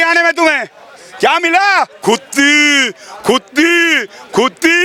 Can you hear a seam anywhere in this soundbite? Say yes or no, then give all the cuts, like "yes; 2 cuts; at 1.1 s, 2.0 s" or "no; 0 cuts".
no; 0 cuts